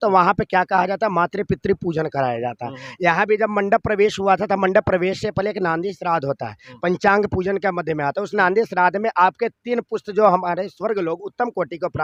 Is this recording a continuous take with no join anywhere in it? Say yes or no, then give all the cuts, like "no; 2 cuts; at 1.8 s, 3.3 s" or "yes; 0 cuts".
yes; 0 cuts